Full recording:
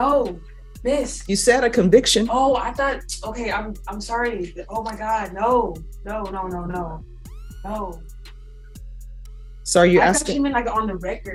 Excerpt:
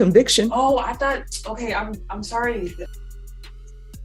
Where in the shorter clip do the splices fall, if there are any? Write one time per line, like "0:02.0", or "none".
0:03.0